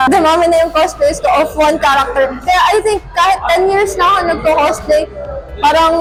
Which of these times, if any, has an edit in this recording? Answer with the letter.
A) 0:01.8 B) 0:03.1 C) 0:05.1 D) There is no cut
D